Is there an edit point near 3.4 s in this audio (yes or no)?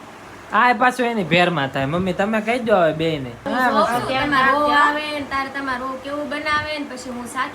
yes